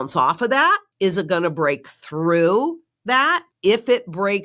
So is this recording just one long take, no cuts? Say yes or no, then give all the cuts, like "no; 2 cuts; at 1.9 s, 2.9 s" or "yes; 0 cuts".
no; 2 cuts; at 0.9 s, 3.5 s